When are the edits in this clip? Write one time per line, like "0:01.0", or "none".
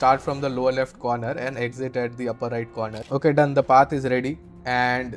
0:03.0